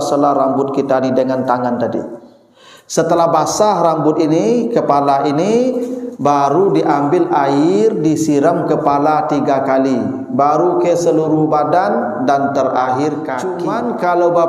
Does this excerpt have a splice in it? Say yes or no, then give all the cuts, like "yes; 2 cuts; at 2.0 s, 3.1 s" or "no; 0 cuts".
yes; 1 cut; at 13.6 s